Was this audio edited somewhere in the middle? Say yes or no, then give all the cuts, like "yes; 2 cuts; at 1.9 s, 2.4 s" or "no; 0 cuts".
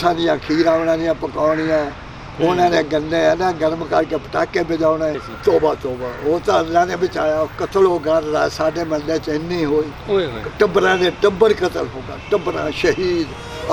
yes; 1 cut; at 5.3 s